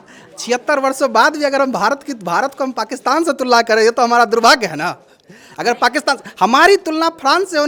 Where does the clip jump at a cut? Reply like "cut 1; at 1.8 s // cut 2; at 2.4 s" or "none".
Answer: none